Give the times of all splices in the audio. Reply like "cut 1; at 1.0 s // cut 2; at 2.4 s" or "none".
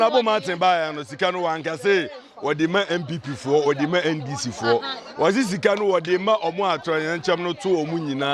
none